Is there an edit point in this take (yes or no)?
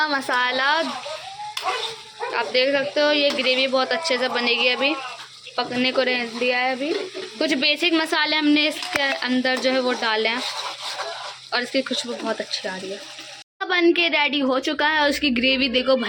no